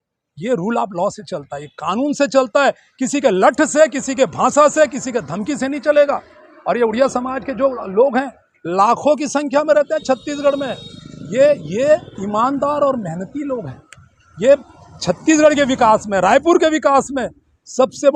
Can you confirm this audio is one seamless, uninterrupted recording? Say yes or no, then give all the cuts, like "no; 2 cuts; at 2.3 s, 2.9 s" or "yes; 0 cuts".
yes; 0 cuts